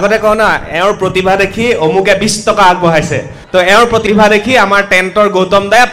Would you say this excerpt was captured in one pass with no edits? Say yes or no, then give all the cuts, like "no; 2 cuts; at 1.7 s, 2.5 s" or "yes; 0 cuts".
no; 2 cuts; at 3.3 s, 4.0 s